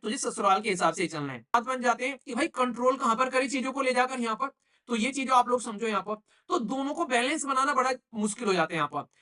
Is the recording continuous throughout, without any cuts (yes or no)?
no